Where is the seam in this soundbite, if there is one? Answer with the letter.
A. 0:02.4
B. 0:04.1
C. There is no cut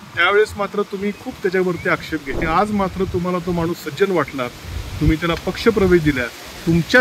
A